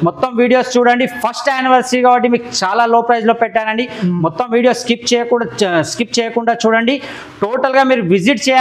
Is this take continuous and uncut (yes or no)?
yes